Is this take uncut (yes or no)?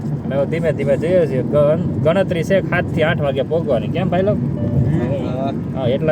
yes